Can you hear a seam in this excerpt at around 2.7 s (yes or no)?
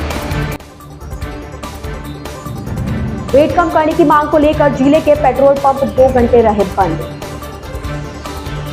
no